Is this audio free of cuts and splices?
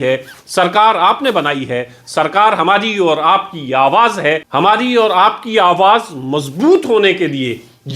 no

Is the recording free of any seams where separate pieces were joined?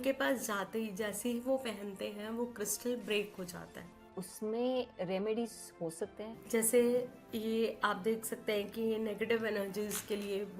no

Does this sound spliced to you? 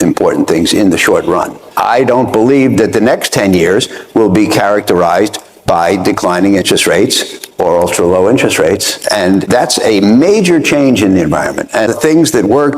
yes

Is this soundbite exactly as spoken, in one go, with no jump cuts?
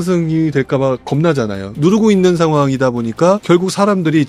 no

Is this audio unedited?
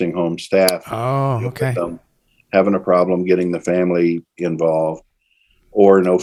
yes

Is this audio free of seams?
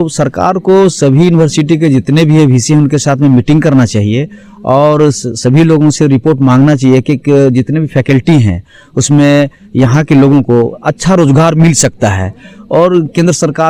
yes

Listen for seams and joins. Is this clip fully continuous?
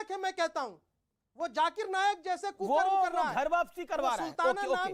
yes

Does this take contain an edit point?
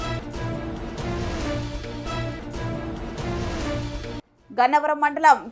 no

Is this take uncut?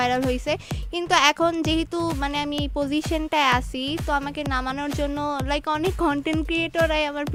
yes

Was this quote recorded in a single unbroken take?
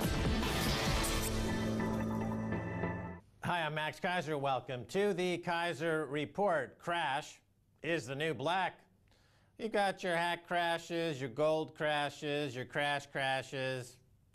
yes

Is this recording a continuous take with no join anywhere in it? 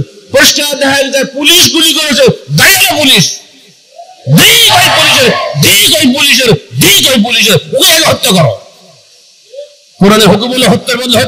yes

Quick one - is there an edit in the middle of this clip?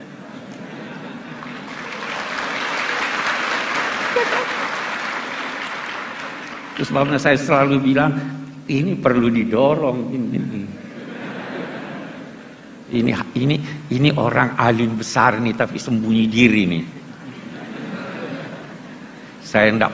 yes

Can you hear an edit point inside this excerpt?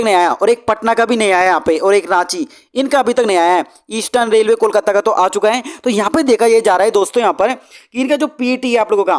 no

